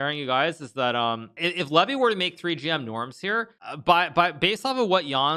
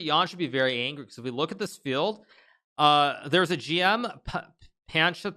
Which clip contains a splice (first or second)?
first